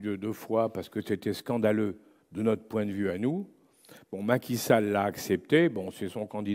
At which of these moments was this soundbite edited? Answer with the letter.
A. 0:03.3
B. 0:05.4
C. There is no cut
C